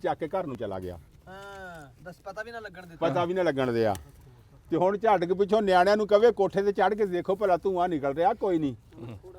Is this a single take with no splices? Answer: no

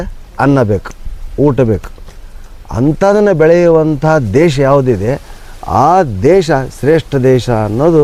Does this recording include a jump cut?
no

